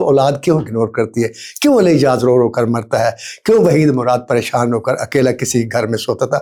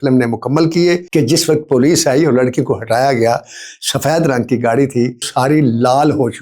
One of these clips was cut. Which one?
second; 2 cuts; at 1.0 s, 5.3 s

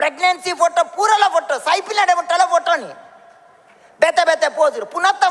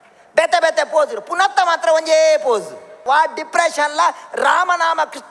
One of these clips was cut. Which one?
second; 1 cut; at 3.0 s

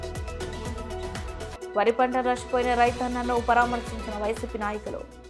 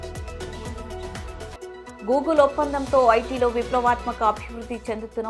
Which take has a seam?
first; 1 cut; at 1.7 s

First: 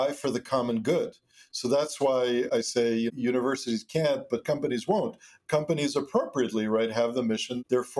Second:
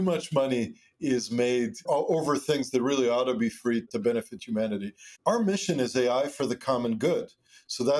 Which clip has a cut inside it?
second; 2 cuts; at 1.8 s, 5.1 s

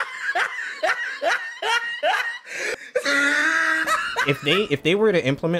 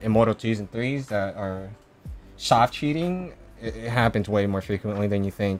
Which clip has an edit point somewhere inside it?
first; 1 cut; at 4.2 s

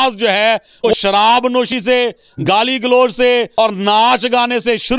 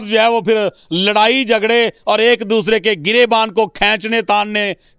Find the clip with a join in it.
first; 3 cuts; at 0.9 s, 1.9 s, 3.5 s

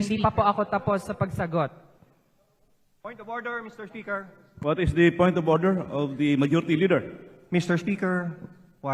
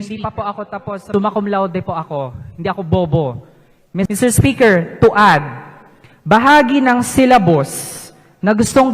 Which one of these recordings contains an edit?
second; 2 cuts; at 1.0 s, 4.1 s

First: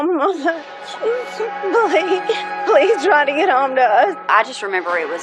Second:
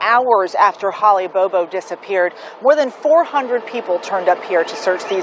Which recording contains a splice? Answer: first; 1 cut; at 4.3 s

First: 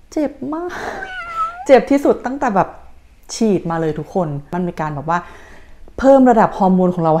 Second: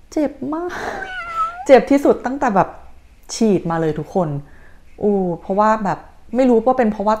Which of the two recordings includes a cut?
first; 1 cut; at 4.5 s

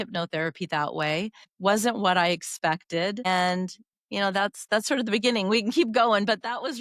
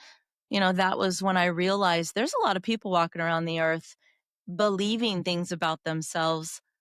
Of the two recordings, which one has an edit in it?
first; 2 cuts; at 1.5 s, 3.2 s

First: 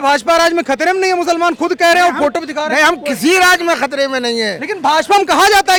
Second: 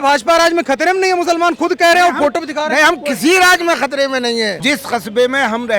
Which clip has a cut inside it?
second; 1 cut; at 4.6 s

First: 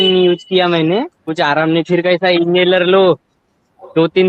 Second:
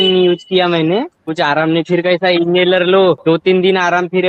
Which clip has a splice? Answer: second; 1 cut; at 3.2 s

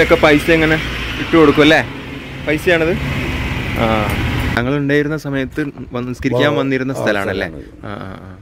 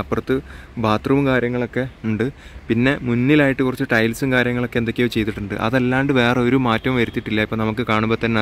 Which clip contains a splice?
first; 1 cut; at 4.6 s

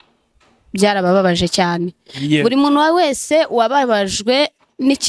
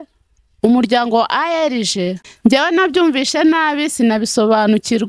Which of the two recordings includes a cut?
second; 1 cut; at 2.2 s

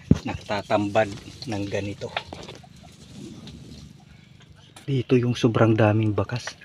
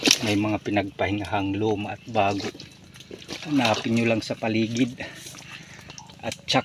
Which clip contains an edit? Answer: first; 1 cut; at 4.9 s

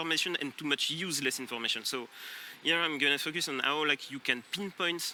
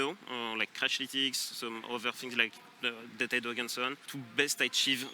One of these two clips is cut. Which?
second; 1 cut; at 4.2 s

